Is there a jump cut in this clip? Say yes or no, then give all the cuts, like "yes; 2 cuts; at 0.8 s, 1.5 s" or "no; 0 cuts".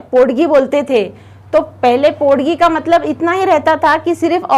no; 0 cuts